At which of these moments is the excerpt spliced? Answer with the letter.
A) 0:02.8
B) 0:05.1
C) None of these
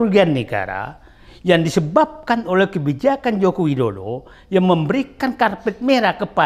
C